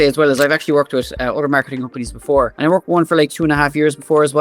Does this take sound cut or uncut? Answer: cut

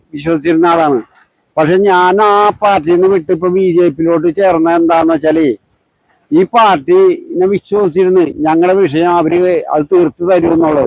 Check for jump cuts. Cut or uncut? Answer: uncut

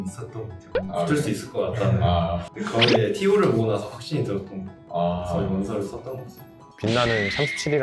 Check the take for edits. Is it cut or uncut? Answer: uncut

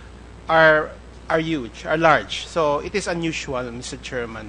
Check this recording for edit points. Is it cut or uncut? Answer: cut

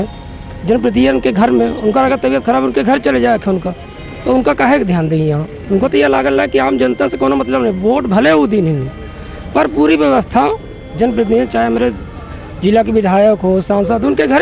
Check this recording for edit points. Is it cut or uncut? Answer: uncut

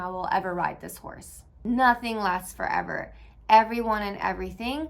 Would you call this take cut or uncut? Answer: cut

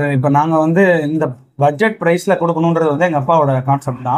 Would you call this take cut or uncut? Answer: uncut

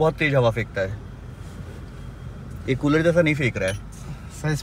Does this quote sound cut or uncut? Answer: uncut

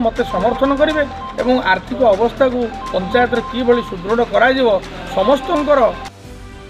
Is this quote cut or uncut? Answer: uncut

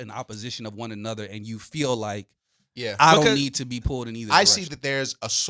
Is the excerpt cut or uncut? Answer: cut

